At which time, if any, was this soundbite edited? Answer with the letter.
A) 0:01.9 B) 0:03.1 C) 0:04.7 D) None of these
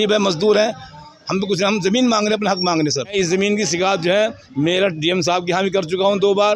B